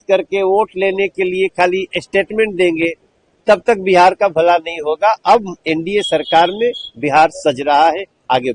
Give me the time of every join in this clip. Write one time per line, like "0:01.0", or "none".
none